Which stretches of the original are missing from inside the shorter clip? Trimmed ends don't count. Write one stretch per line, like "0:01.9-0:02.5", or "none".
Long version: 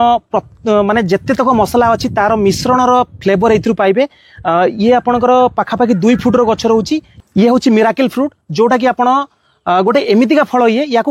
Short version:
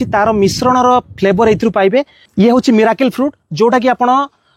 0:04.2-0:07.2

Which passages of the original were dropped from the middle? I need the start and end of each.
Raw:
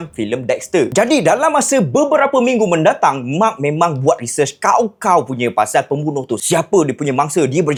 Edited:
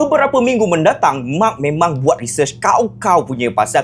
none

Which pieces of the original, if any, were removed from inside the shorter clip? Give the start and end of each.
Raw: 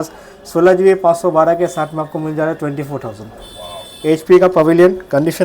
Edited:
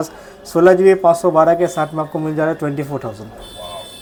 none

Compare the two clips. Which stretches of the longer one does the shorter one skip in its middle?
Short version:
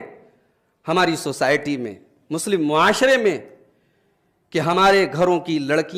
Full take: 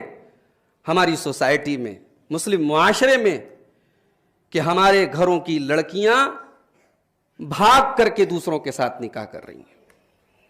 none

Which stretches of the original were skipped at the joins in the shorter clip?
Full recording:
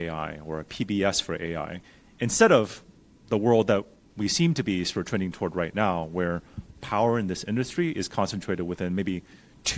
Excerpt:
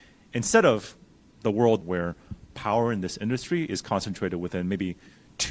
0:03.7-0:06.1

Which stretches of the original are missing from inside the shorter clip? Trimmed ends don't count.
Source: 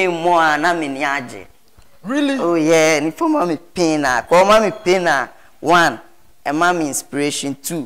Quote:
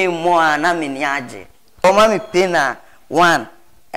0:01.8-0:04.4

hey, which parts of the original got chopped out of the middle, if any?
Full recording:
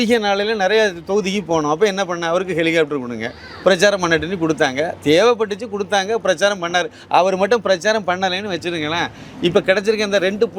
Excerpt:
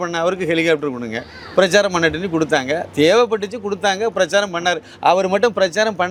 none

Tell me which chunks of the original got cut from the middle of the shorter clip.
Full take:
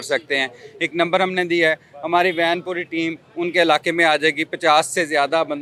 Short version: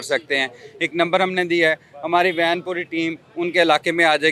none

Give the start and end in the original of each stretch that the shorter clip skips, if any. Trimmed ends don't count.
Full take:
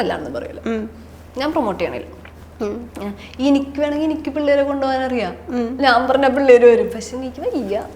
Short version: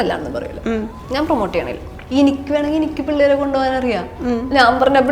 0:01.0-0:01.2
0:02.2-0:03.2

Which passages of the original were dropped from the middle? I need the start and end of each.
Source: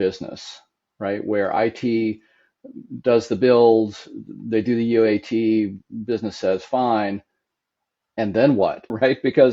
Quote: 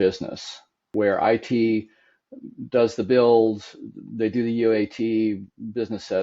0:00.9-0:01.2

